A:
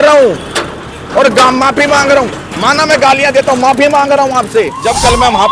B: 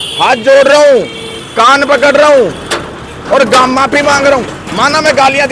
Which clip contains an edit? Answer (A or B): A